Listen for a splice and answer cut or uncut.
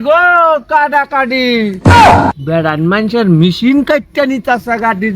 cut